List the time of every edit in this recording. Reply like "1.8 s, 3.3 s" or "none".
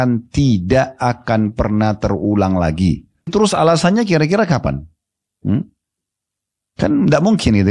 3.3 s

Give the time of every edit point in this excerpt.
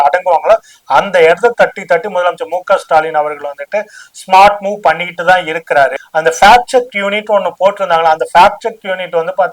5.9 s

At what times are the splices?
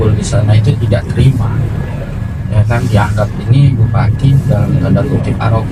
none

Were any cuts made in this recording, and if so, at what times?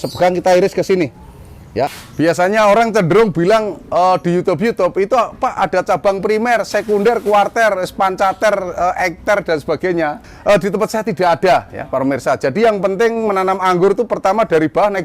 1.9 s, 10.3 s

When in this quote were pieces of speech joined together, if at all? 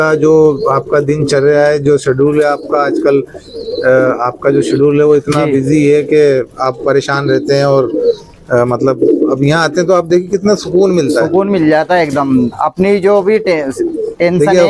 none

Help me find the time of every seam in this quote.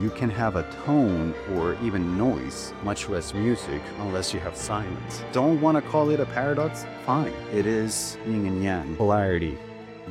none

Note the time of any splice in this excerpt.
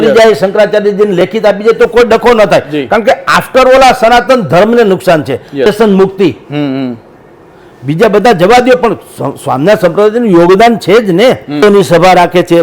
5.7 s, 11.6 s

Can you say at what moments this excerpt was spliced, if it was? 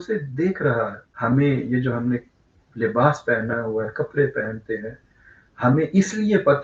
1.0 s

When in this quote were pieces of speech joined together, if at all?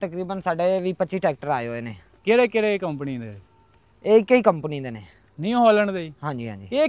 none

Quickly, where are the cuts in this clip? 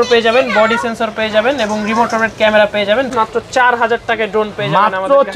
3.1 s

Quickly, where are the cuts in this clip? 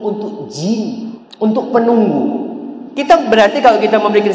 1.2 s

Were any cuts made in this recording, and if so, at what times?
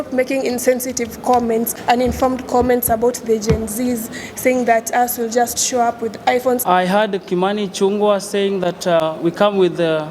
1.7 s, 6.6 s, 9.0 s

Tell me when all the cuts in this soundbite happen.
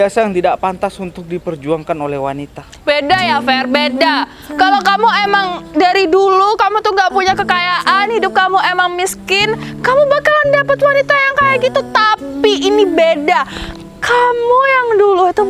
none

